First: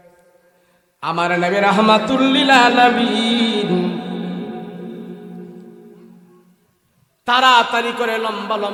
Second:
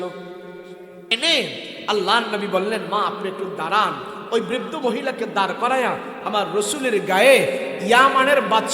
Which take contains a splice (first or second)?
second